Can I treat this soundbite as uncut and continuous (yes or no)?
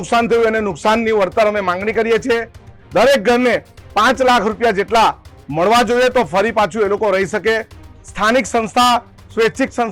yes